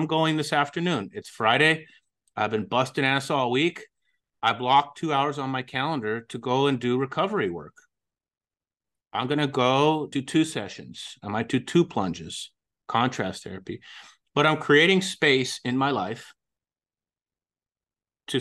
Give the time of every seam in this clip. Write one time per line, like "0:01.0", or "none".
0:10.1